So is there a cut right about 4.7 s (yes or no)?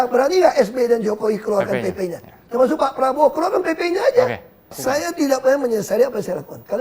yes